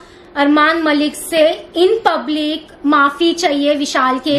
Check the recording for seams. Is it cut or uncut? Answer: uncut